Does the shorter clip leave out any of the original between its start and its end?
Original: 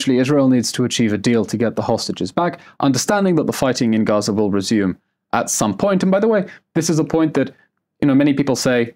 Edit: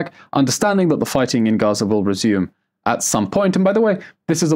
no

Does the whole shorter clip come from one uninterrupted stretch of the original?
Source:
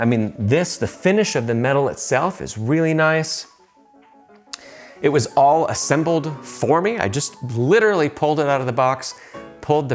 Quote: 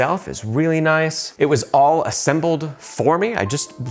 no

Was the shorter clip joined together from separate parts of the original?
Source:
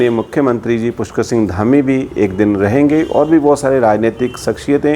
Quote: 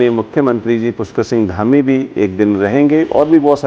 no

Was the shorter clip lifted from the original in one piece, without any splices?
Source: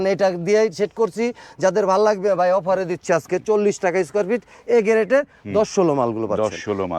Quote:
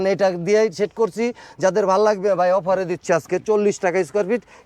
yes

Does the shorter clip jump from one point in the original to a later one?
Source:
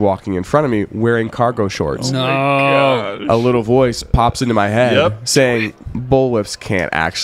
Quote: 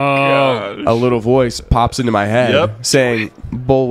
no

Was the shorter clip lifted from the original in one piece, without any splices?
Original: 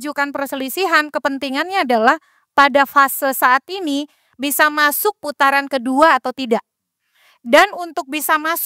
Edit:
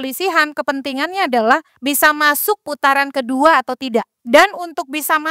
no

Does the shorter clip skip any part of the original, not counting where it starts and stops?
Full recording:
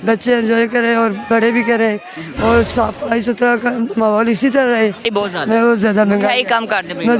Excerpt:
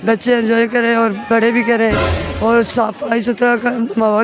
no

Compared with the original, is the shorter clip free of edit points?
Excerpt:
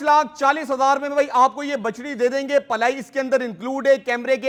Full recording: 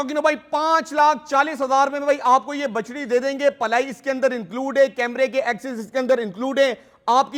yes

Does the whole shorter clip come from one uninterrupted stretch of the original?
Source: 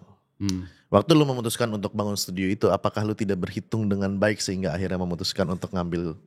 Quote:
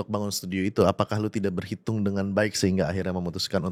yes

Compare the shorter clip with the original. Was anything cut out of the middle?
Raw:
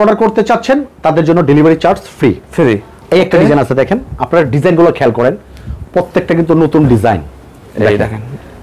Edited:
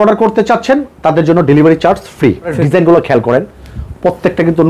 yes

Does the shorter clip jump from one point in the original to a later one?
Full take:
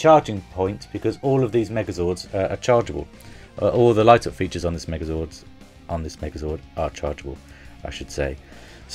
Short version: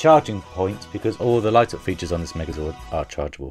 yes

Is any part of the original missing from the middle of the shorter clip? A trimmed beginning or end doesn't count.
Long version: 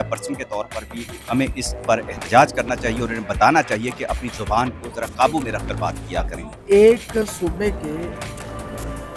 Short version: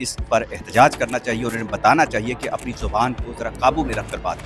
no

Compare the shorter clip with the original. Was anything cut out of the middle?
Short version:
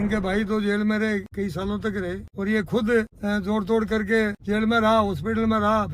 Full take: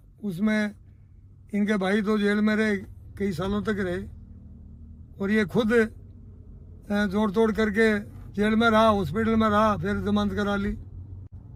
yes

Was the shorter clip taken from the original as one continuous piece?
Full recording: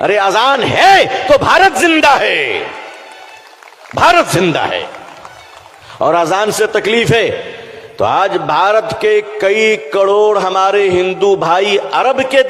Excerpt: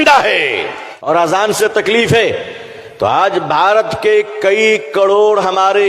no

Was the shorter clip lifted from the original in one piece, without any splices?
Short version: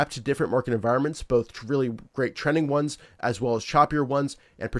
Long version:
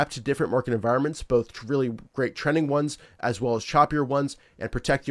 yes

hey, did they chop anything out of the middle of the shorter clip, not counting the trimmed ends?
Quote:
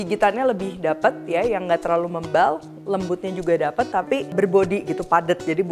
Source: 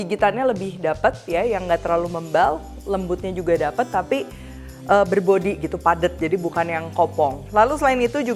yes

